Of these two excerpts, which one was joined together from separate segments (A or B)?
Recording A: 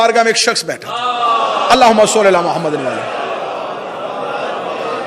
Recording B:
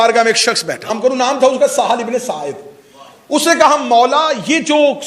B